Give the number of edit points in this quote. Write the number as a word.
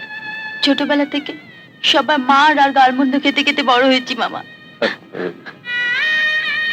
zero